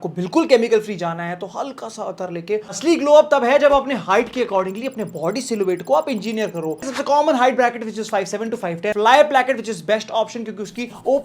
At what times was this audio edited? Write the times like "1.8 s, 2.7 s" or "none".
2.8 s, 6.8 s, 8.9 s